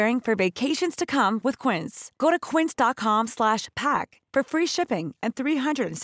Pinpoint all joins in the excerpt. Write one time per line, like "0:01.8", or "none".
none